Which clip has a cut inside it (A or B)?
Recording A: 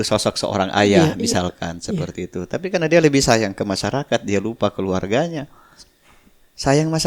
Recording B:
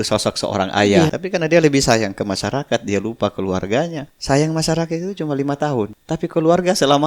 B